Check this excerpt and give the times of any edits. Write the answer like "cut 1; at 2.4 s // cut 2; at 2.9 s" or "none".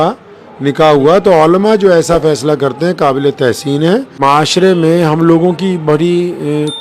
cut 1; at 4.1 s